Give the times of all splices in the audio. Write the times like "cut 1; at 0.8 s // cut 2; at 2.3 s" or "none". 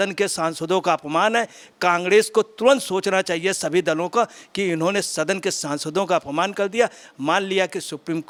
none